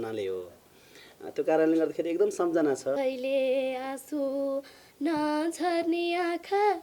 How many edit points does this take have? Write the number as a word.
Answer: one